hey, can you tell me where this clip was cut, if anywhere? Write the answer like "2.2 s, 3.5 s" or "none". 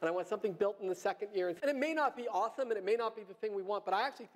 1.6 s